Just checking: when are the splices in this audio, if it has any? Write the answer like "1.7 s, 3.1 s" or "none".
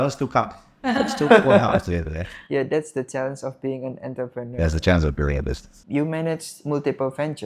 5.7 s